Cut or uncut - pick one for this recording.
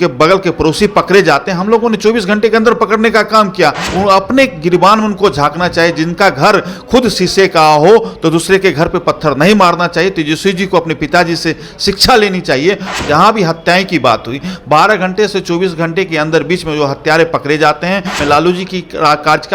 cut